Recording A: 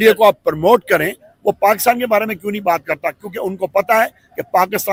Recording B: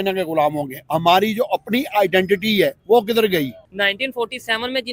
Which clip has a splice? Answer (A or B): B